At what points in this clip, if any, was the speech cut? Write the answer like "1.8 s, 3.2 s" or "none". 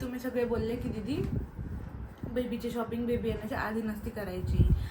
none